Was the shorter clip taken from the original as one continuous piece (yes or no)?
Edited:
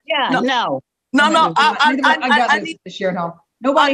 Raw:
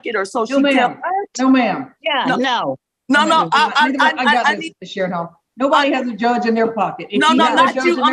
yes